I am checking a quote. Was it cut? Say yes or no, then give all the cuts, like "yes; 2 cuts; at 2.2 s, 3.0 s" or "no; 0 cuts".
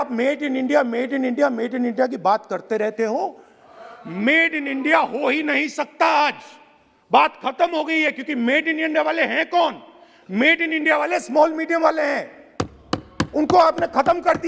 no; 0 cuts